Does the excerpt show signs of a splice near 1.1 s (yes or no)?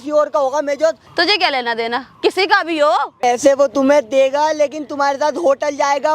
yes